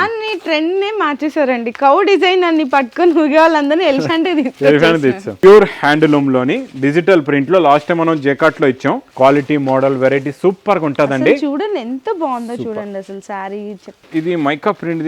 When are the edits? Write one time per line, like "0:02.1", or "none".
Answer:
0:05.3
0:09.1
0:14.0